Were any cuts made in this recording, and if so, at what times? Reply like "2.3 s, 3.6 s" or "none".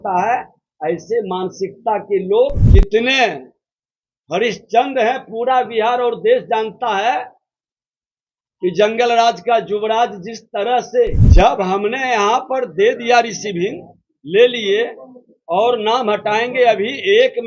2.6 s, 11.2 s